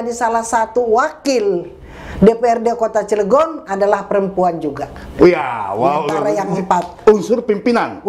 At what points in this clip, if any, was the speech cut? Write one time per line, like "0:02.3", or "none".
none